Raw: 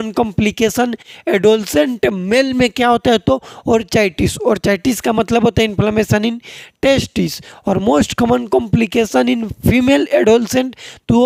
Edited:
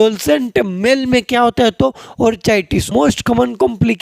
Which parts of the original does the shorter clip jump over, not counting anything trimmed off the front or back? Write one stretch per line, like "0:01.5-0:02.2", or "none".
0:04.4-0:07.8